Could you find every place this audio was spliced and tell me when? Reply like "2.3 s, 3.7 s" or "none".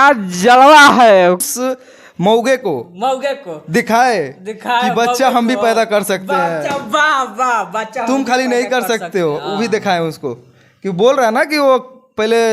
1.4 s

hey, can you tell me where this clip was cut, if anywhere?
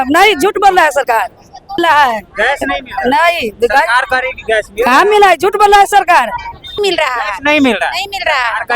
1.8 s, 6.7 s

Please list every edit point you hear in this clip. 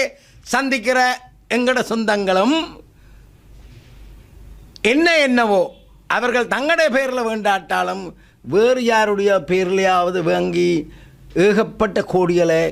none

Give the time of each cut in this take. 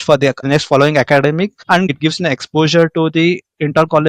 1.9 s

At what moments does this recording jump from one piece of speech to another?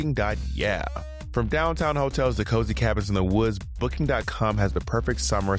1.0 s

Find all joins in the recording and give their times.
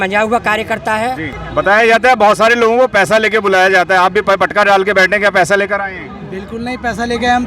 1.3 s

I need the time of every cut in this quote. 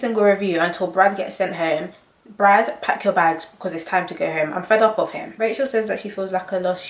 5.2 s

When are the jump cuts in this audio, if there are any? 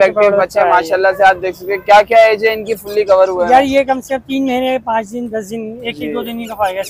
none

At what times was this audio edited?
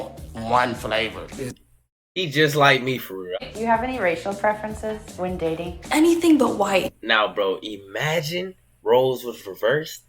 3.3 s, 6.8 s

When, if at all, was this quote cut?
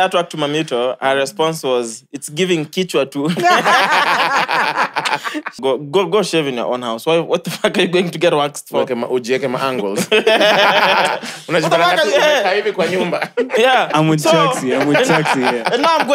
5.6 s

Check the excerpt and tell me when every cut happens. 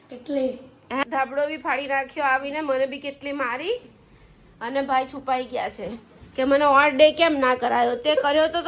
1.1 s

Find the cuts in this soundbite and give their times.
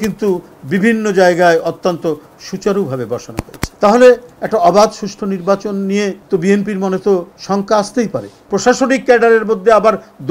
3.6 s, 6.2 s, 7.3 s, 8.3 s

